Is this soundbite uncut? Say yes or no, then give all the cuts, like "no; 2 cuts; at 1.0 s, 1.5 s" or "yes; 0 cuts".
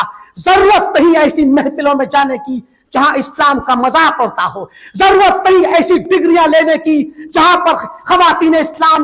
yes; 0 cuts